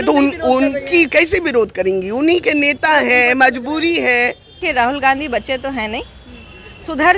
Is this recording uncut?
no; 1 cut; at 4.6 s

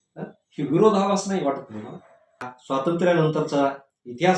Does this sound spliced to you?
yes; 1 cut; at 2.6 s

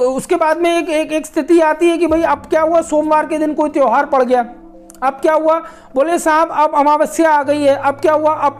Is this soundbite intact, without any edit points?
yes; 0 cuts

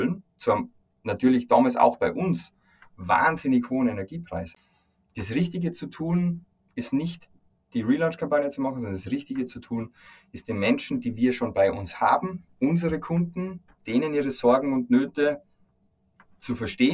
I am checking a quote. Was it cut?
yes; 1 cut; at 4.5 s

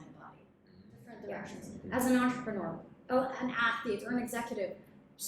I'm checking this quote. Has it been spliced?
yes; 1 cut; at 1.1 s

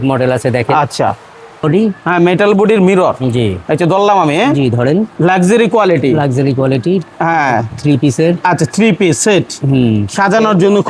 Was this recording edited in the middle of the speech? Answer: yes; 1 cut; at 1.6 s

